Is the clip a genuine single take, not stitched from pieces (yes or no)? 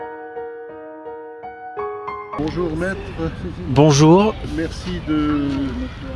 yes